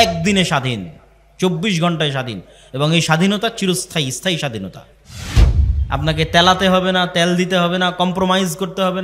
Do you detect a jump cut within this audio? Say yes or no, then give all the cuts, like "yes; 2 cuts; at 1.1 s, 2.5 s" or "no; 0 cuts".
no; 0 cuts